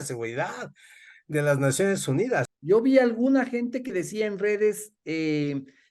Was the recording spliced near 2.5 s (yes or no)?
yes